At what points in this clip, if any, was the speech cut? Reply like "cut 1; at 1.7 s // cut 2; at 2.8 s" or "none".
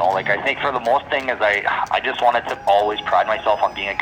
none